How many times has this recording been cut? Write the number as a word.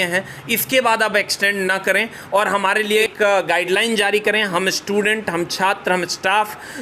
one